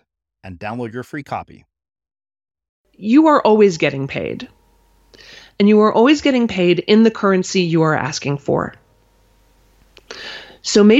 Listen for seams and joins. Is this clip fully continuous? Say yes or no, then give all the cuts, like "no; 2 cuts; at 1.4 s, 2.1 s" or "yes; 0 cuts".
no; 1 cut; at 2.9 s